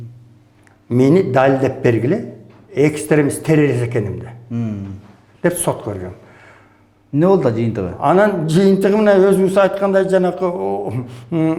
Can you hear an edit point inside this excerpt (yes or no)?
no